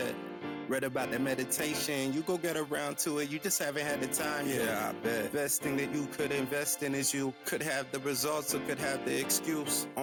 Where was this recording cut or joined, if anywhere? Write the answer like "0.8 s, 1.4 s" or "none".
none